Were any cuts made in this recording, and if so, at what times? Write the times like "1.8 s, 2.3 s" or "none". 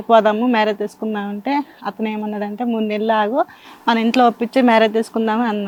none